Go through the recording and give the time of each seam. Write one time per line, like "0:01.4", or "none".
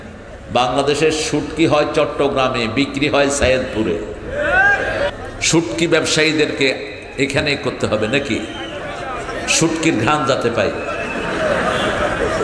0:05.1